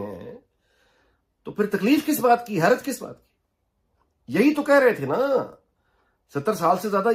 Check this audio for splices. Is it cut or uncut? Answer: uncut